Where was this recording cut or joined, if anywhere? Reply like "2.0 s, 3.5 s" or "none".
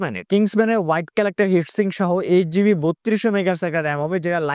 none